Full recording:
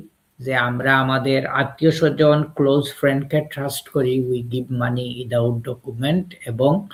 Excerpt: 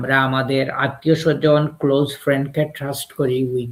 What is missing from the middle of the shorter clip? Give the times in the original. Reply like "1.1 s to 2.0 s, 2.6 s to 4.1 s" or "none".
none